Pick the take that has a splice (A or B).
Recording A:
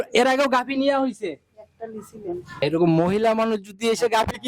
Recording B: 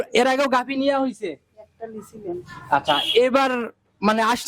A